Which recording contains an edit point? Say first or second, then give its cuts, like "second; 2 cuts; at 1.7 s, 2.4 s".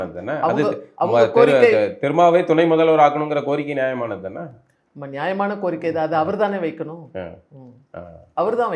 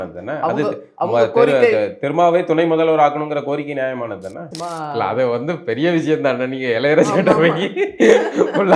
second; 1 cut; at 4.5 s